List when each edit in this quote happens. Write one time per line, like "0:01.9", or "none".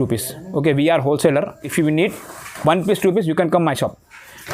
0:01.7